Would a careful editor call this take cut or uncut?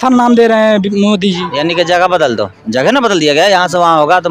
cut